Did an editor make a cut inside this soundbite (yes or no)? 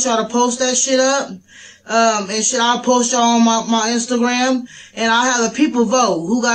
no